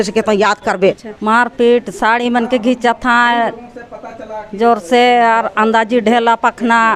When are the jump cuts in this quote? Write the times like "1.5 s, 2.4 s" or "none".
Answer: 1.1 s

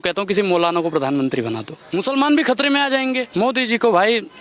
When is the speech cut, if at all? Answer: 1.7 s, 3.3 s

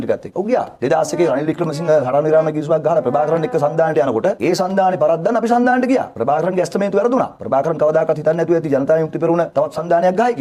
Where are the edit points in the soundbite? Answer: none

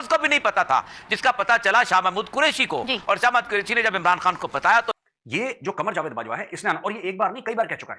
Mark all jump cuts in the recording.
4.9 s

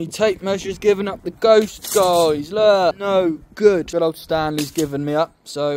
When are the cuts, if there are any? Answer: 3.0 s, 3.9 s

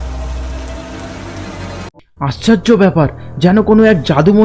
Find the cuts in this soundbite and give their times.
1.9 s

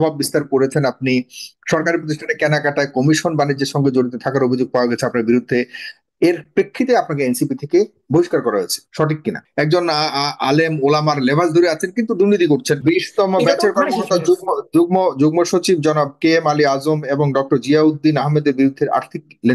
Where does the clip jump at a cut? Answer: 9.4 s, 12.8 s

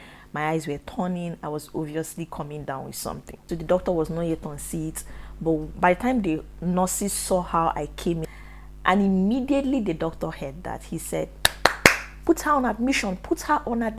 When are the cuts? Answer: 3.4 s, 8.2 s

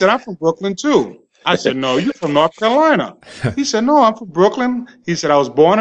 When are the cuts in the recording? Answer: none

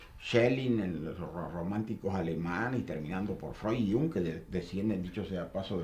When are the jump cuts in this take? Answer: 2.5 s

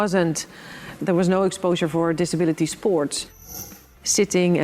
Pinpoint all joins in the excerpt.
1.0 s, 3.7 s

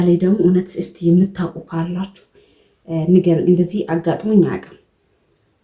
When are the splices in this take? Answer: none

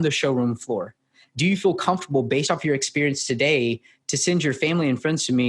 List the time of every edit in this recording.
1.2 s

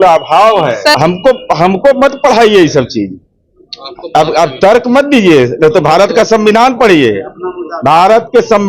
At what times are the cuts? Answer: 1.0 s

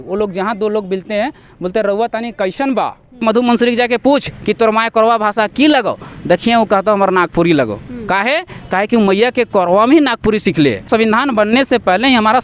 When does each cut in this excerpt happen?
3.2 s, 10.9 s

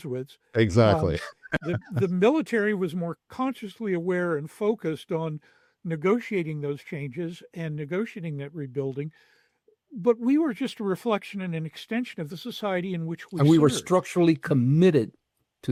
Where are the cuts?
none

